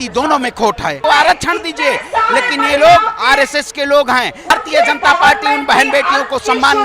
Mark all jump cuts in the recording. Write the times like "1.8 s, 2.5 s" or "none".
1.0 s, 4.5 s